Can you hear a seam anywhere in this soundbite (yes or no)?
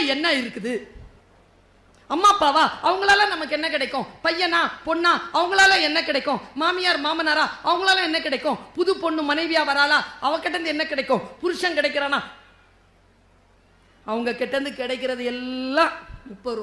no